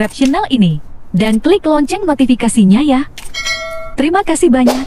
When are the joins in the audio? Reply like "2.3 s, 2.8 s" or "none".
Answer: none